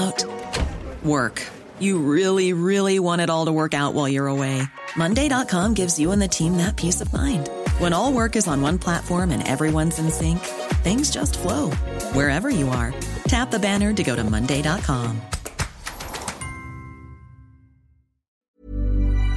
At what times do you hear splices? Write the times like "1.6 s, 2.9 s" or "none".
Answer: 18.4 s

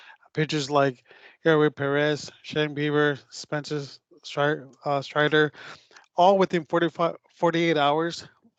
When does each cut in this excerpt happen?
none

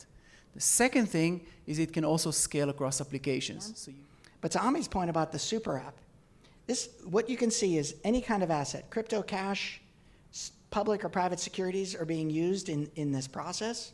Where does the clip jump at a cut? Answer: 3.8 s

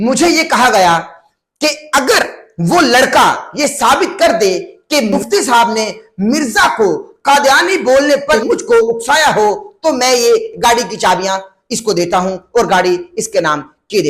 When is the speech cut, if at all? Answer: 5.1 s, 8.4 s

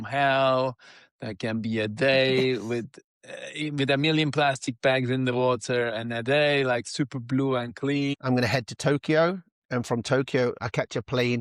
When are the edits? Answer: 8.2 s

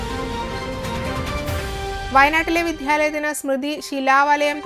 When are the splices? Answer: 1.5 s

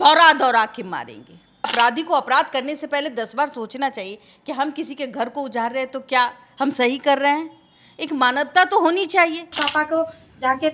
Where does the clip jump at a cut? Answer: 1.7 s, 9.5 s

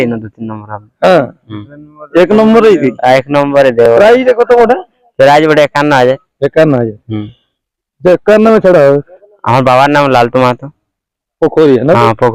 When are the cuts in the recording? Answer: none

